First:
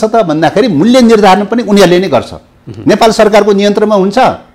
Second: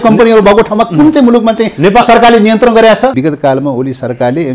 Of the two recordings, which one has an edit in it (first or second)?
second